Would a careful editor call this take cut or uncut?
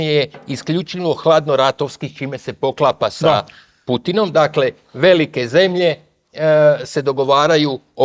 uncut